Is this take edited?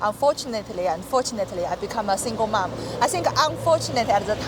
no; 0 cuts

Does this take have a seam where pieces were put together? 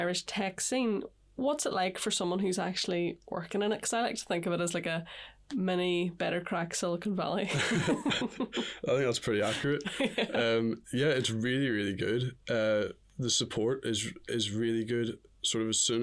no; 0 cuts

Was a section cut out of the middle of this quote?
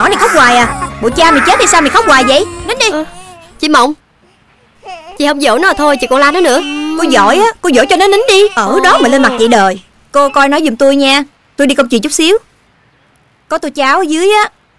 yes; 3 cuts; at 2.6 s, 6.8 s, 9.9 s

